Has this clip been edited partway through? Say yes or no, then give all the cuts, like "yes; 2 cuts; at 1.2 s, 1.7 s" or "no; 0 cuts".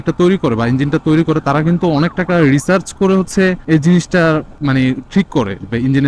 no; 0 cuts